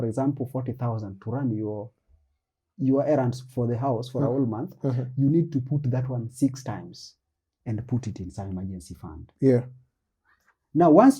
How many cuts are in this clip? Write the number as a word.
zero